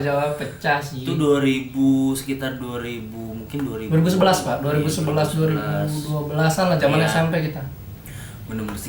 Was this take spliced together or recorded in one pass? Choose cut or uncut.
uncut